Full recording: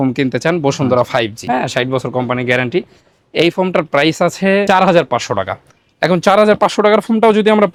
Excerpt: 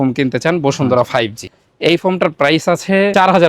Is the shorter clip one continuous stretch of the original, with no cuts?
no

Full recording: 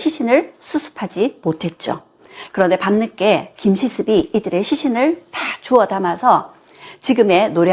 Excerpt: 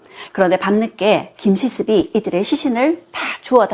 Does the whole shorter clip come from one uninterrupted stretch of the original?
yes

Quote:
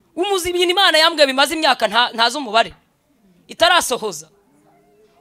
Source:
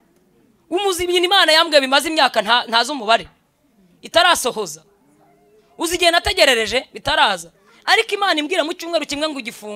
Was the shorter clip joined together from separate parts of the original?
no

